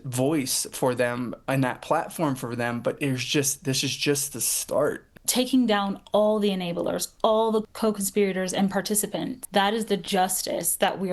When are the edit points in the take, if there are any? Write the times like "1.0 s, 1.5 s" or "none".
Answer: 5.1 s, 7.7 s, 9.4 s